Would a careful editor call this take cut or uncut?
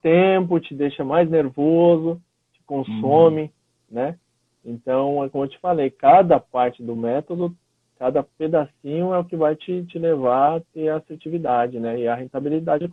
uncut